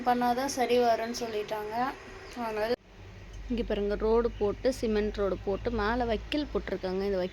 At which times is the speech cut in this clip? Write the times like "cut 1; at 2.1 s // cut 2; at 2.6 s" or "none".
cut 1; at 2.7 s